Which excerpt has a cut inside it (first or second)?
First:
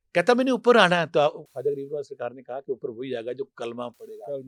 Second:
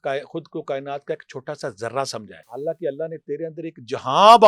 second